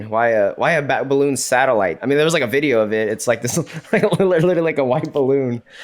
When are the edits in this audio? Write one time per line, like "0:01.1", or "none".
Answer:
0:02.0